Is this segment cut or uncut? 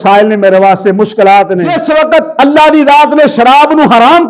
cut